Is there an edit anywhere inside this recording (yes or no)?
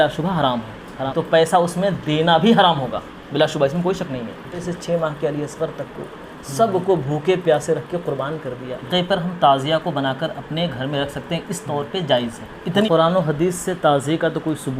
yes